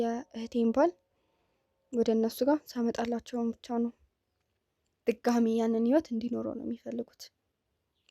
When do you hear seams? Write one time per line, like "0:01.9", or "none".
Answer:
0:04.0